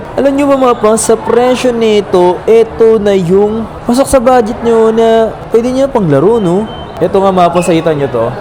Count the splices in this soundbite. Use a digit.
1